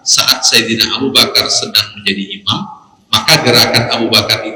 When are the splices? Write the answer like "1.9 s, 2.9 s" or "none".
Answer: none